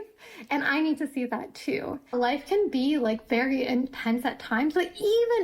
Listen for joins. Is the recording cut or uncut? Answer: cut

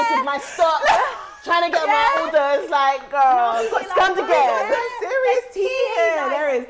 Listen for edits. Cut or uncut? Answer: uncut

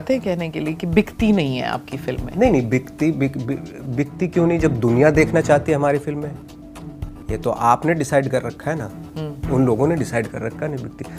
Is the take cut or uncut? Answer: uncut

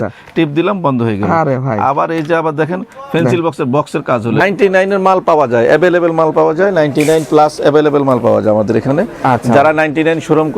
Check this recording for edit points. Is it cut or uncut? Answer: cut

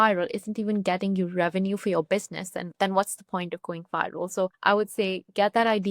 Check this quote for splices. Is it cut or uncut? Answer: cut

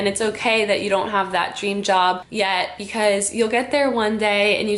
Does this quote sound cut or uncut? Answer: cut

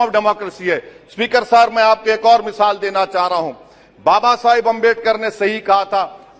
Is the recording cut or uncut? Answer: uncut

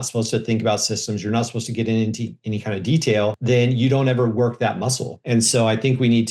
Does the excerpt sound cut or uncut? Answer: cut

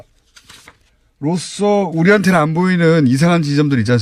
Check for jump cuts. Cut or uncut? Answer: cut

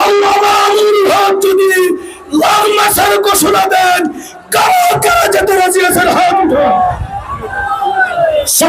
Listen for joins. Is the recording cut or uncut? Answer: cut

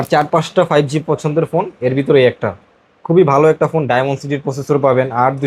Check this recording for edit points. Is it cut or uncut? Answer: uncut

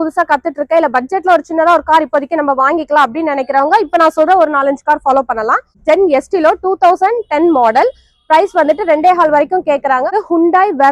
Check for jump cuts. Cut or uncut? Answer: cut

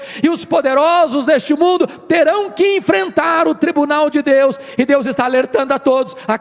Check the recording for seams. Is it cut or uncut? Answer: uncut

